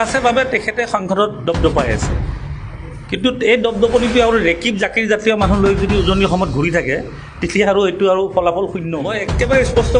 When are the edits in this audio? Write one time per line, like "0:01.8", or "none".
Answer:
0:09.1